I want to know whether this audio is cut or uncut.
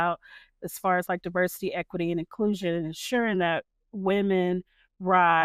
uncut